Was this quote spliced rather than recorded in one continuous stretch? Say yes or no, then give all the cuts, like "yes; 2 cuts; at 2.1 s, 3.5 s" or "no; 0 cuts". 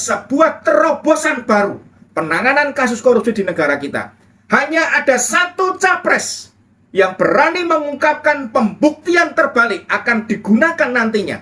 no; 0 cuts